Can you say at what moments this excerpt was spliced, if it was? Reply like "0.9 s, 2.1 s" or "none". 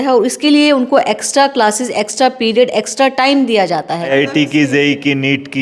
4.1 s